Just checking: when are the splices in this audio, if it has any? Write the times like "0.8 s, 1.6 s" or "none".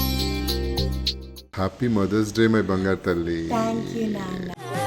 1.5 s